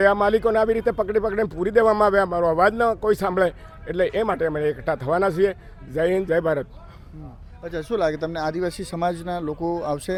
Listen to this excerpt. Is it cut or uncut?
uncut